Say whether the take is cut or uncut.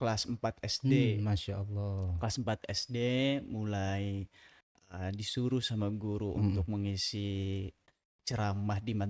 uncut